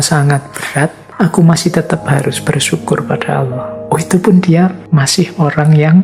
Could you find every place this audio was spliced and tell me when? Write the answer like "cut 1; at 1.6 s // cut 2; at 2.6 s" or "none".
cut 1; at 1.0 s // cut 2; at 4.8 s